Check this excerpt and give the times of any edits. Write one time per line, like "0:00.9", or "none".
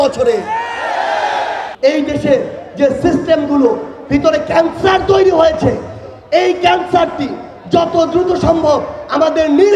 0:01.7